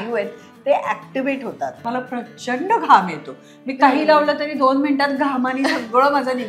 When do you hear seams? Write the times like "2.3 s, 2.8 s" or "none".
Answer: 1.8 s